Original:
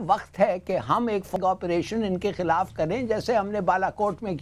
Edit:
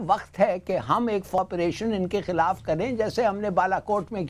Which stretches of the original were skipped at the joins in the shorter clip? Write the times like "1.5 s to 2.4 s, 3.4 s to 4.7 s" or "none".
1.4 s to 1.5 s